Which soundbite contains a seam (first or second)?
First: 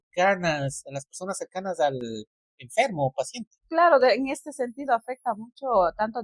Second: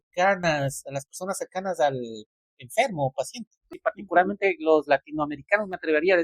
second